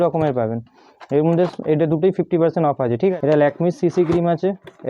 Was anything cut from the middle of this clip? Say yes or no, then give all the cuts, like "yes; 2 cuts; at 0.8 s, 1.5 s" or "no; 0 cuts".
yes; 1 cut; at 3.1 s